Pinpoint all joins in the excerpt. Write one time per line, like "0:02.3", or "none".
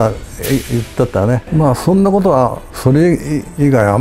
0:01.4
0:02.7